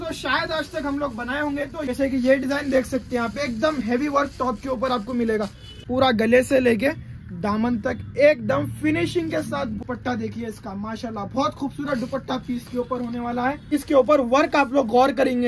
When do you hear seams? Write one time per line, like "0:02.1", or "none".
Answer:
0:01.9
0:05.7
0:09.8
0:13.7